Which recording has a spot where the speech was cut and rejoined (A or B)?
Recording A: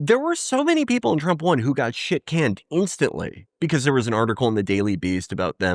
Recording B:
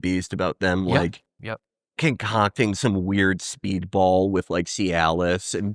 B